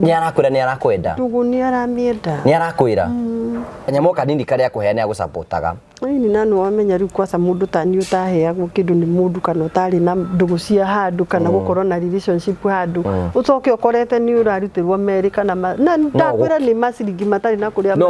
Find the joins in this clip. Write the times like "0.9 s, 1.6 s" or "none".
3.9 s